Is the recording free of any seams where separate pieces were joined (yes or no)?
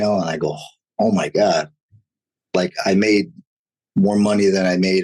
yes